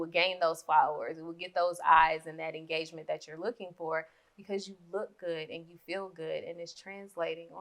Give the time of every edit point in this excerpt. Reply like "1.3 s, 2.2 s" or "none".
none